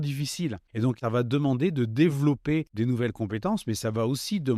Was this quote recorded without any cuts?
no; 1 cut; at 1.0 s

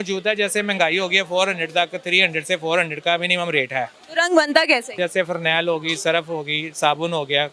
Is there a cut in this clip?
yes; 2 cuts; at 4.0 s, 5.0 s

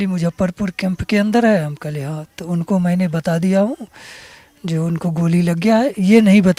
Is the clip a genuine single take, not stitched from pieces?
yes; 0 cuts

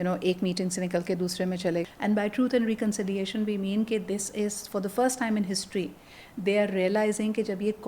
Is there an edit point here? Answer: yes; 1 cut; at 1.8 s

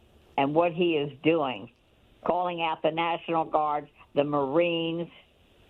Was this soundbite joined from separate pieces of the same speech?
no; 0 cuts

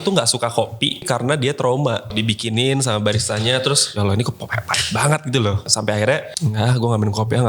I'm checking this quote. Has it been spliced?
yes; 5 cuts; at 1.1 s, 2.1 s, 3.9 s, 5.6 s, 6.3 s

